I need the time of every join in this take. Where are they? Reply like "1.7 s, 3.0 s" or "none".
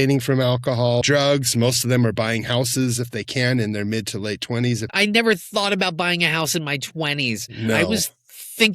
1.0 s, 4.9 s